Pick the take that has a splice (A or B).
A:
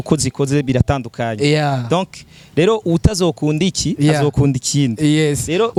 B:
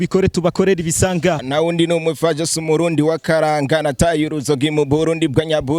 B